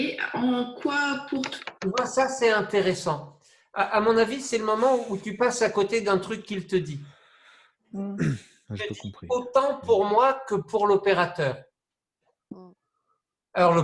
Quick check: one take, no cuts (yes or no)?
yes